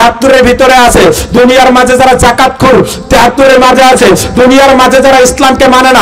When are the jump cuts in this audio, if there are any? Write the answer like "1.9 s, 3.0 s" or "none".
none

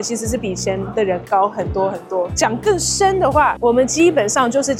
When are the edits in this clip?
none

